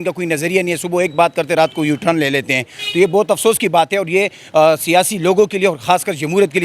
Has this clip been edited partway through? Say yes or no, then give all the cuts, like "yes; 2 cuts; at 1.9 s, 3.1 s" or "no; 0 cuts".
no; 0 cuts